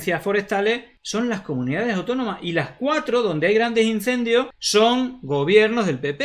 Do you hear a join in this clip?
yes; 2 cuts; at 0.9 s, 4.6 s

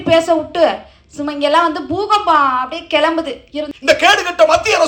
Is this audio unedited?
no; 1 cut; at 3.7 s

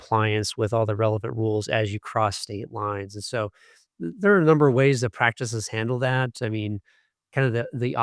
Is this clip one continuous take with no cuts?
yes; 0 cuts

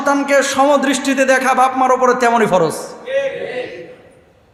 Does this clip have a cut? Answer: no; 0 cuts

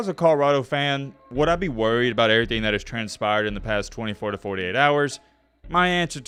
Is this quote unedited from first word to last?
yes; 0 cuts

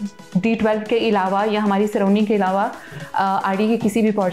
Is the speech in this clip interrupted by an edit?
no; 0 cuts

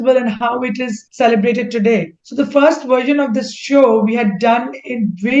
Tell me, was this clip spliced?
yes; 2 cuts; at 1.0 s, 2.2 s

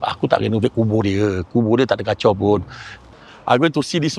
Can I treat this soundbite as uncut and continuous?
no; 1 cut; at 3.0 s

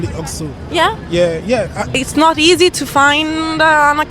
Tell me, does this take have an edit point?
yes; 1 cut; at 1.5 s

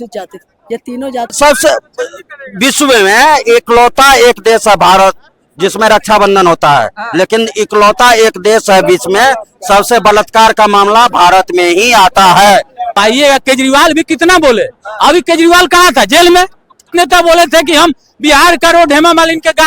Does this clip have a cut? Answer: yes; 3 cuts; at 1.3 s, 13.0 s, 16.9 s

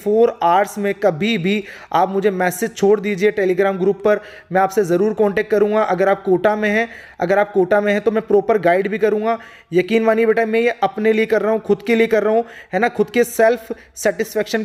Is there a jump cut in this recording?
no; 0 cuts

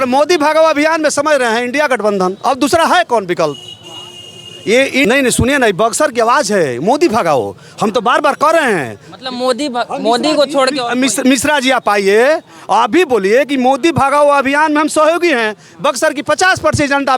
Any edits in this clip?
yes; 1 cut; at 5.0 s

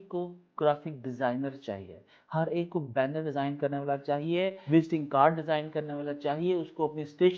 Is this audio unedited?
yes; 0 cuts

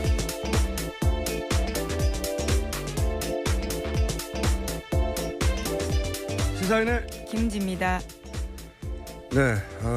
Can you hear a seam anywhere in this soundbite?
yes; 1 cut; at 4.0 s

